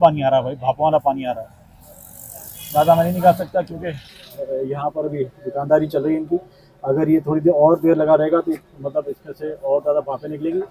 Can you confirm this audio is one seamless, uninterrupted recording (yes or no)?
yes